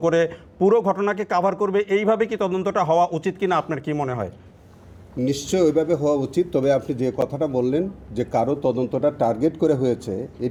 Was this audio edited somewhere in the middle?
no; 0 cuts

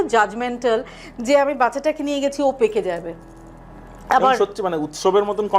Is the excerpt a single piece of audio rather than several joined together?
yes; 0 cuts

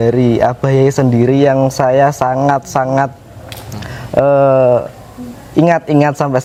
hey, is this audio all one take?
yes; 0 cuts

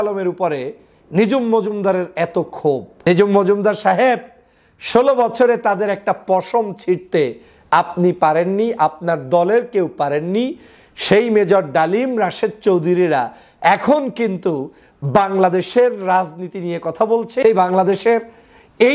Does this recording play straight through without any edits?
no; 2 cuts; at 2.9 s, 17.4 s

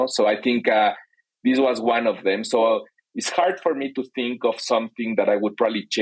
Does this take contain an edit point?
no; 0 cuts

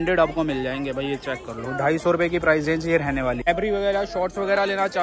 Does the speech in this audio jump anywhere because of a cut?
yes; 1 cut; at 3.5 s

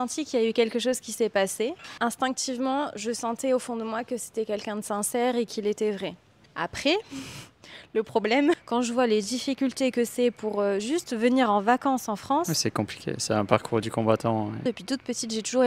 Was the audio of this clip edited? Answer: yes; 3 cuts; at 1.9 s, 8.6 s, 14.6 s

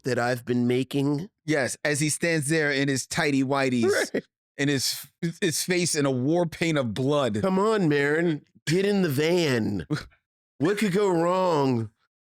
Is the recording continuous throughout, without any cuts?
no; 1 cut; at 1.3 s

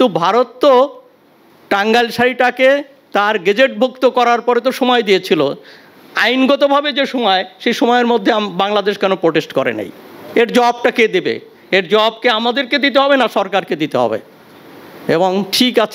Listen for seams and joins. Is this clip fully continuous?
yes; 0 cuts

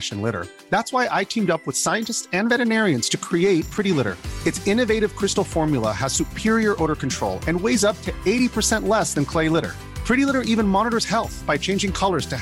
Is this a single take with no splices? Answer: yes; 0 cuts

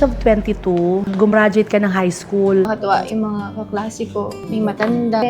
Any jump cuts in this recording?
yes; 1 cut; at 2.7 s

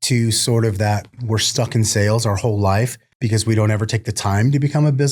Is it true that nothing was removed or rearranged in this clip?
no; 1 cut; at 3.0 s

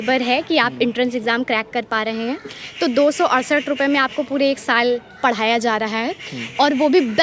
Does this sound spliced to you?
no; 0 cuts

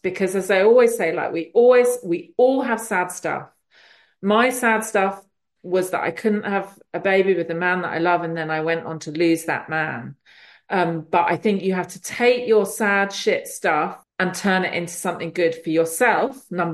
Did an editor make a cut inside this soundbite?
yes; 1 cut; at 14.0 s

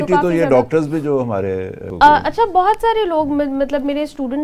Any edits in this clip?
yes; 1 cut; at 1.8 s

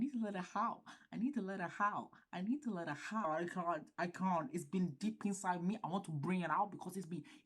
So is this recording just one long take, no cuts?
no; 1 cut; at 3.2 s

